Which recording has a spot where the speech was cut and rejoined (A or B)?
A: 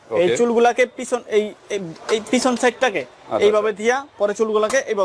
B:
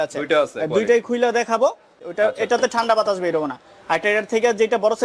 B